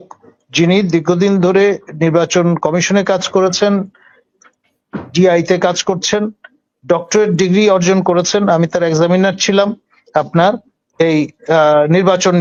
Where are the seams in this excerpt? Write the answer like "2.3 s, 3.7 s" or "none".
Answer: none